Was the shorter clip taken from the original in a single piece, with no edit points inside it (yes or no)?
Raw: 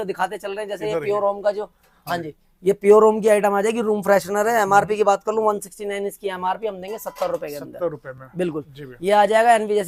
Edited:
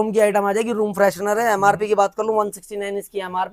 yes